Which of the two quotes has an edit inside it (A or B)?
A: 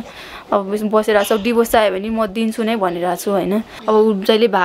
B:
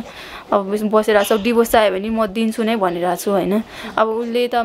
A